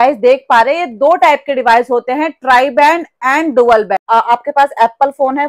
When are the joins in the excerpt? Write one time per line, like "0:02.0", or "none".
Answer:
0:04.0